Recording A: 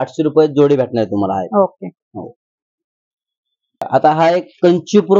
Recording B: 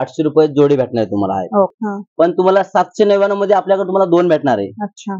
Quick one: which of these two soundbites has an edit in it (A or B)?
B